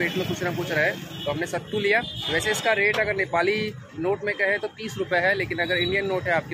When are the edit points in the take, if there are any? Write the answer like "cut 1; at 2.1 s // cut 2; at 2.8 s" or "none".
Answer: none